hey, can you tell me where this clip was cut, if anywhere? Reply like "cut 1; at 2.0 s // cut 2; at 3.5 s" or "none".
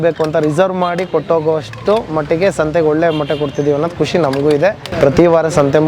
cut 1; at 4.8 s